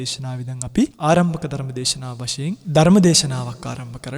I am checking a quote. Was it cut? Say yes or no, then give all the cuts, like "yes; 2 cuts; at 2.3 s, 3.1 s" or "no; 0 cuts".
yes; 2 cuts; at 0.9 s, 2.6 s